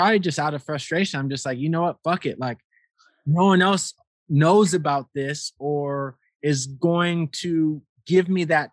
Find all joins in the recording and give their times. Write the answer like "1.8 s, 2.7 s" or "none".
none